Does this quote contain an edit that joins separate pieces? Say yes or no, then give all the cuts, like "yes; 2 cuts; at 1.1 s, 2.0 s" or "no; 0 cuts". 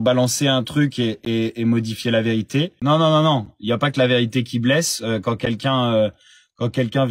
yes; 1 cut; at 2.7 s